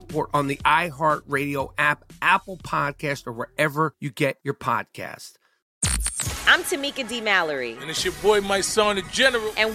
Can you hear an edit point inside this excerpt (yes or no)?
yes